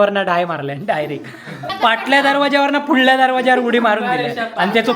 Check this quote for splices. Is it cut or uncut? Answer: uncut